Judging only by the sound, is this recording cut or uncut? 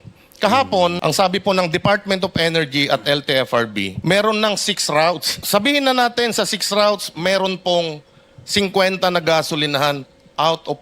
cut